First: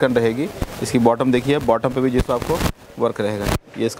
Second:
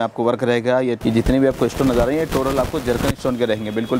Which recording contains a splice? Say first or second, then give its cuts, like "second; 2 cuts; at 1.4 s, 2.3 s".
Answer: second; 1 cut; at 1.0 s